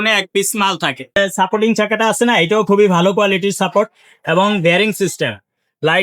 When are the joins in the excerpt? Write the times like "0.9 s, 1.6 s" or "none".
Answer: 1.2 s